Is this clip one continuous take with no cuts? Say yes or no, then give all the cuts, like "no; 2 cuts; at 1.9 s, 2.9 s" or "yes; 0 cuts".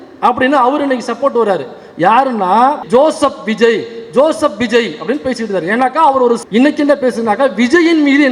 no; 2 cuts; at 2.8 s, 6.4 s